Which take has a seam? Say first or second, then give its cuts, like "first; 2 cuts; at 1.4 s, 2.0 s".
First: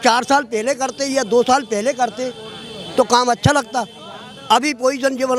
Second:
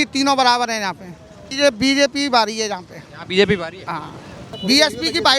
second; 2 cuts; at 1.5 s, 4.5 s